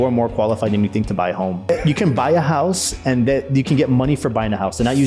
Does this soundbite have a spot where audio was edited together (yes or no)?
yes